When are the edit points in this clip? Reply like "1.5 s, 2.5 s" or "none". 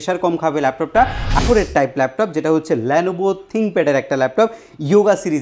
1.4 s